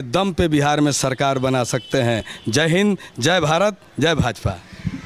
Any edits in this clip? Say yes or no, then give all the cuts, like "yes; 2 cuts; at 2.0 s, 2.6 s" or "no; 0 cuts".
no; 0 cuts